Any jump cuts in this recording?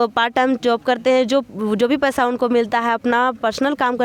no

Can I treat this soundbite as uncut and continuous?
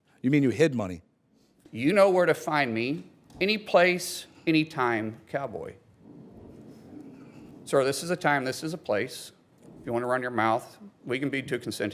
no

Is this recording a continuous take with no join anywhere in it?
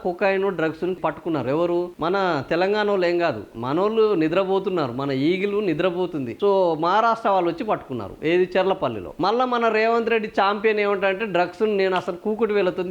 no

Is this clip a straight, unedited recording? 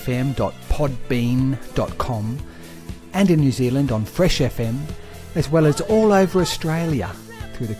yes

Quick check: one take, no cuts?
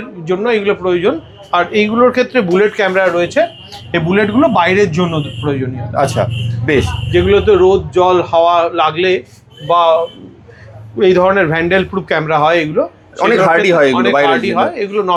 yes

